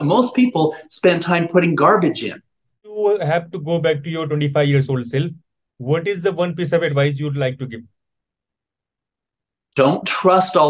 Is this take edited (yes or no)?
yes